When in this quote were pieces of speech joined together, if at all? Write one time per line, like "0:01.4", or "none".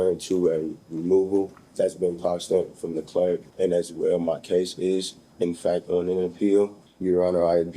0:01.6
0:03.5
0:06.9